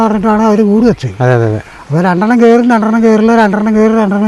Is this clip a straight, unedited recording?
yes; 0 cuts

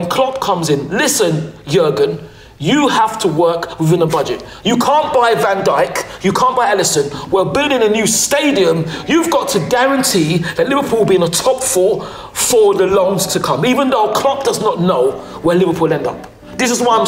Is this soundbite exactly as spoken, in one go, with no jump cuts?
yes; 0 cuts

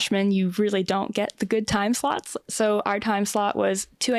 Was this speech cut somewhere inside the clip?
no; 0 cuts

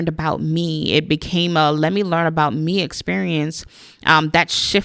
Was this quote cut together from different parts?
no; 0 cuts

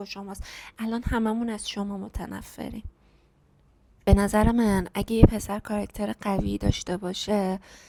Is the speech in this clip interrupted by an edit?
no; 0 cuts

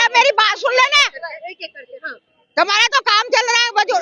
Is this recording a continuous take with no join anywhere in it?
yes; 0 cuts

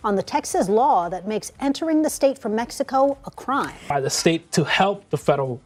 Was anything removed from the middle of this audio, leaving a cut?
no; 0 cuts

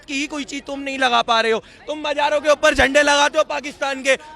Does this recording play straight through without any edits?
yes; 0 cuts

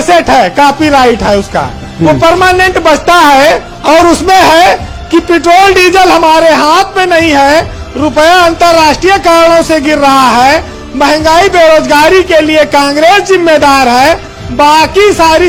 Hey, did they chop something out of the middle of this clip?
no; 0 cuts

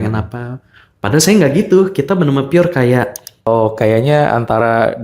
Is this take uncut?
no; 1 cut; at 3.5 s

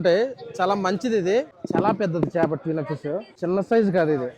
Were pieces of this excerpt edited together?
yes; 2 cuts; at 1.6 s, 3.3 s

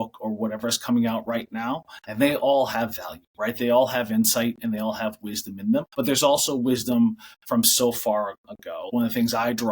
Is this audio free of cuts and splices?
no; 2 cuts; at 5.9 s, 8.8 s

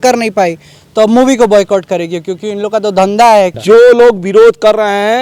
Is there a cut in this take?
yes; 1 cut; at 3.6 s

